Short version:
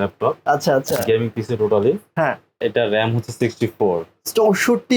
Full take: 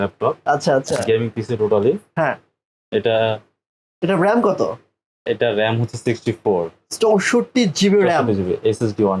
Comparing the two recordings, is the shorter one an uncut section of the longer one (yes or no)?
no